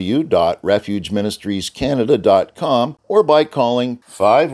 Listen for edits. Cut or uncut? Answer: cut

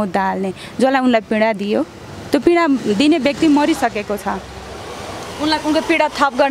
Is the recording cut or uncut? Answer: uncut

